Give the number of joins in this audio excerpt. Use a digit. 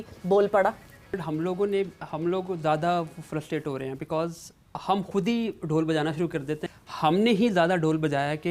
2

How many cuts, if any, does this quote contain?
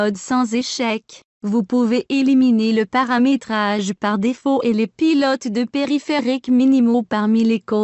1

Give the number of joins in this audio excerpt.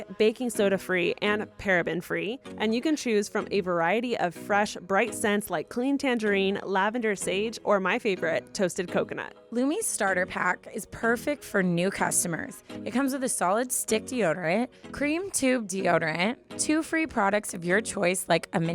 1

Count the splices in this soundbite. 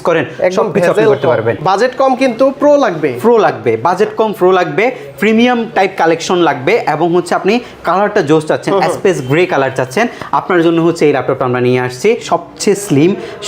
2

